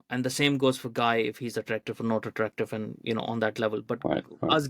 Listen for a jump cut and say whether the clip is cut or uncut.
uncut